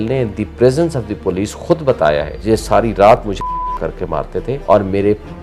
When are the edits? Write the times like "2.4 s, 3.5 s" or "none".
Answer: 2.3 s, 4.5 s